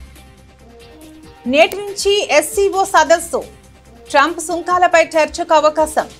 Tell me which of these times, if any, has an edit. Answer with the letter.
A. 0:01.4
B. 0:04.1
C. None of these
A